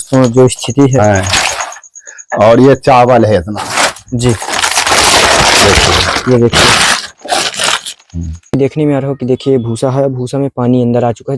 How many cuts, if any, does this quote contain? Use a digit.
1